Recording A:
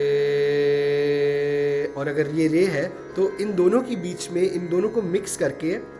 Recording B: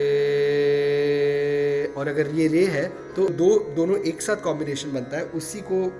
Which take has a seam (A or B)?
B